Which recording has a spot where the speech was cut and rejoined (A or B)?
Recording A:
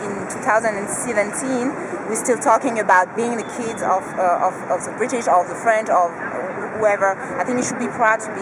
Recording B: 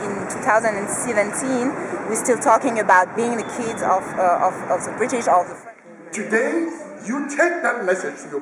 B